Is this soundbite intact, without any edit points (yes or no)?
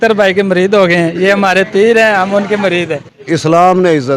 no